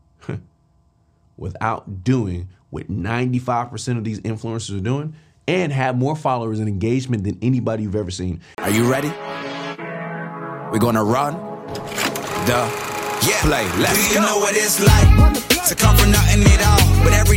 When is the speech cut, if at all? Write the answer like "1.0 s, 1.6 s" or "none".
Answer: 8.4 s

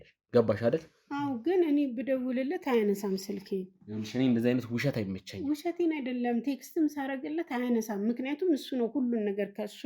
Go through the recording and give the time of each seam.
none

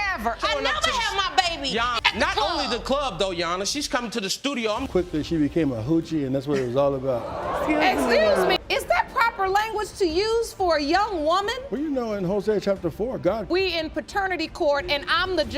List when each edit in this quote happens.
4.9 s, 13.5 s

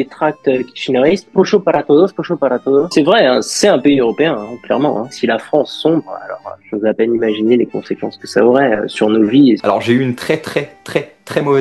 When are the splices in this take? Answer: 1.3 s, 2.9 s, 5.1 s, 9.6 s

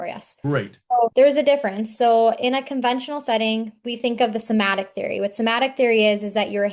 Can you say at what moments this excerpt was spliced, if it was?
none

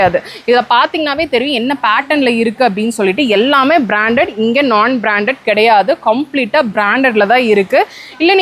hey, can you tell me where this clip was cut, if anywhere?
none

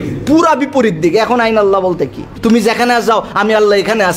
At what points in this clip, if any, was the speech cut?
2.3 s

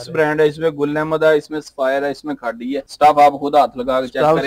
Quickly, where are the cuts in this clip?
none

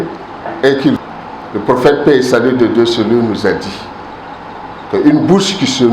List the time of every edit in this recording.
1.0 s

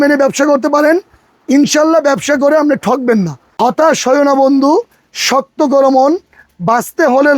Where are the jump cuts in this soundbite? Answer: 3.4 s

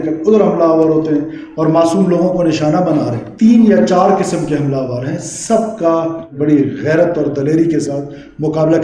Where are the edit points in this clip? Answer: 3.2 s, 6.3 s

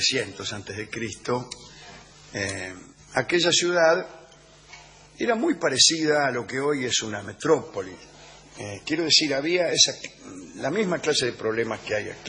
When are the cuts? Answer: 6.2 s

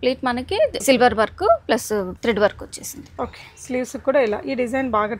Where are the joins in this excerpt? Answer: 0.8 s, 2.1 s

